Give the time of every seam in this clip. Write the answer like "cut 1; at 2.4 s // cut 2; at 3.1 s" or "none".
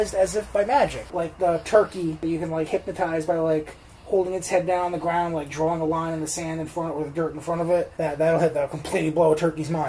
cut 1; at 1.0 s // cut 2; at 2.7 s // cut 3; at 7.9 s